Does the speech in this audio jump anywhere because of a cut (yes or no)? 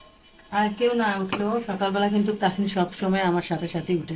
no